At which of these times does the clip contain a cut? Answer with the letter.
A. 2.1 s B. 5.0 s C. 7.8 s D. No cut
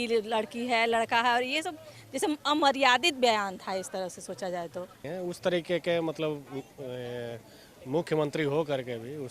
B